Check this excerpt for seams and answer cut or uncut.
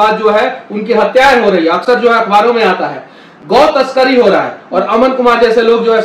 uncut